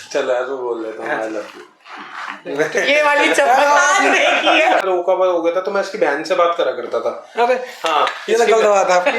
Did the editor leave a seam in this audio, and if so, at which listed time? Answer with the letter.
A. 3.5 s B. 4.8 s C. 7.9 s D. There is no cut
B